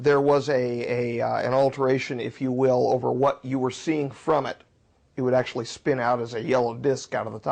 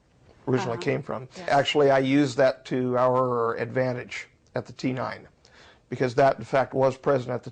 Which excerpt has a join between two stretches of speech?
second; 1 cut; at 1.5 s

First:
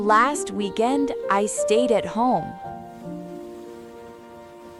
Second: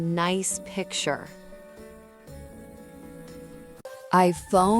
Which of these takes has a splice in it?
second; 1 cut; at 3.8 s

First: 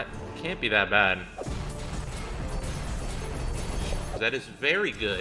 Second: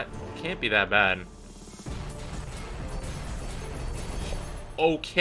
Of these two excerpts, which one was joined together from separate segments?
first; 2 cuts; at 1.4 s, 4.2 s

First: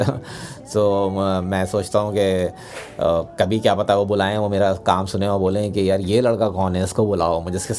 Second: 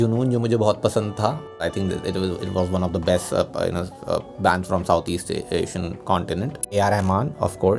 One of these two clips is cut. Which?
second; 2 cuts; at 1.6 s, 6.7 s

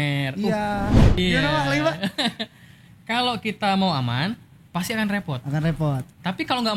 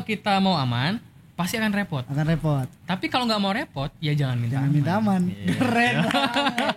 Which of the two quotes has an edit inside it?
first; 1 cut; at 1.2 s

